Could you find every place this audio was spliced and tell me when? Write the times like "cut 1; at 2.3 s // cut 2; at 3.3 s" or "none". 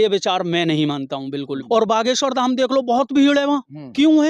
cut 1; at 1.6 s